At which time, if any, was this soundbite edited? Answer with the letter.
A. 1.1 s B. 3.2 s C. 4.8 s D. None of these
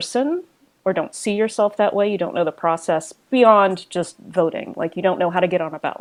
D